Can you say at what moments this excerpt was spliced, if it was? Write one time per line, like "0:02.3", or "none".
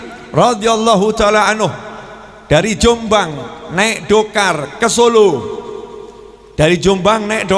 none